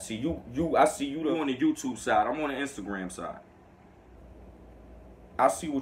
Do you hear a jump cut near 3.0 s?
no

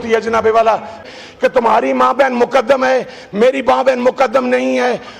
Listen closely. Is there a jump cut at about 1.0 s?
yes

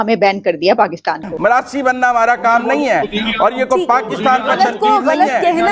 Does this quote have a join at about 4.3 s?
no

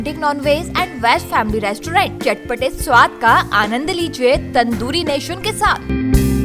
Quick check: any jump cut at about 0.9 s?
no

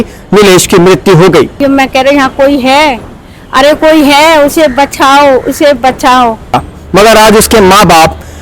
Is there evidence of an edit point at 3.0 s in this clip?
no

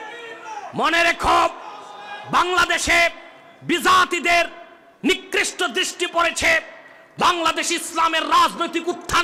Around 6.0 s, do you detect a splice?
no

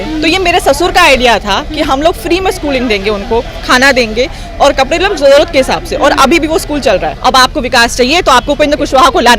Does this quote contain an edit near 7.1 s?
yes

